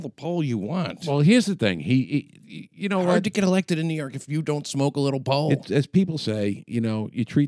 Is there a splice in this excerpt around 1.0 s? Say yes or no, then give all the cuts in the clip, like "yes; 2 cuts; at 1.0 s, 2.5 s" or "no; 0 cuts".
yes; 1 cut; at 1.0 s